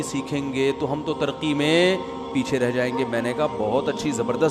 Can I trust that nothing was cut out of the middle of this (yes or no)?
yes